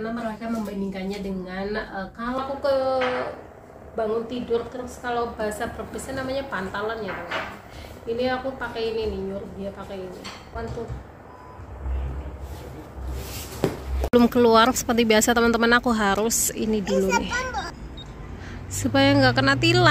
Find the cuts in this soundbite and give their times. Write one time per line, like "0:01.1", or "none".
0:02.4
0:10.4
0:14.1
0:17.8